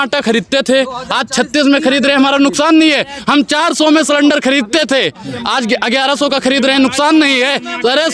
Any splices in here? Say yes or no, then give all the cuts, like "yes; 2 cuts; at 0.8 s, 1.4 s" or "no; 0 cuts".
no; 0 cuts